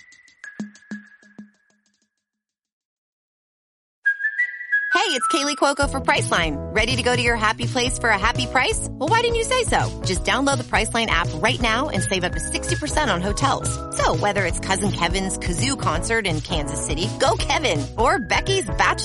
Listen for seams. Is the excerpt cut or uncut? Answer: uncut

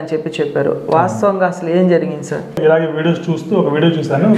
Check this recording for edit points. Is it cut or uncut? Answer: cut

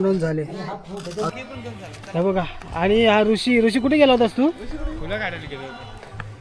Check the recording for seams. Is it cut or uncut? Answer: cut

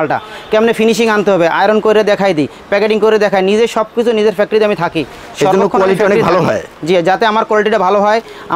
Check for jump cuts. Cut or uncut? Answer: uncut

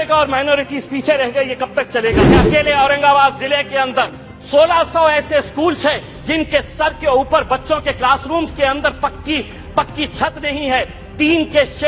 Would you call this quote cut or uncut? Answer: cut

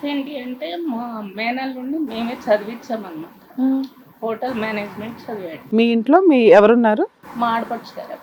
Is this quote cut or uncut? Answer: cut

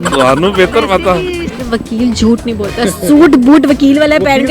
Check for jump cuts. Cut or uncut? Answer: cut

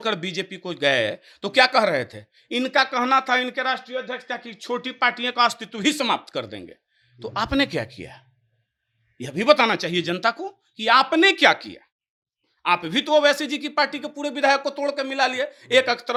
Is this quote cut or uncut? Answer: uncut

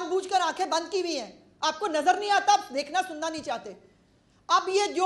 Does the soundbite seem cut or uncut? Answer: uncut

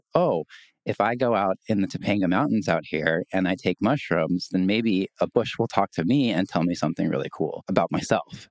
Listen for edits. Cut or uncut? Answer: cut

